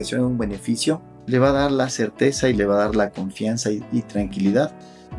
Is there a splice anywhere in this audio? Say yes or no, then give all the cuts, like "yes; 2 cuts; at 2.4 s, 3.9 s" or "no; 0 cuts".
yes; 1 cut; at 1.1 s